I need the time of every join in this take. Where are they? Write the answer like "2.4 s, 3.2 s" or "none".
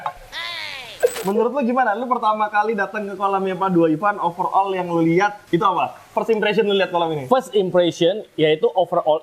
1.2 s, 5.4 s